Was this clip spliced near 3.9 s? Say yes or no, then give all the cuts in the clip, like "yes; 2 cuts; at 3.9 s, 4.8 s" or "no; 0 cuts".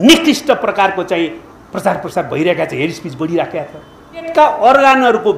no; 0 cuts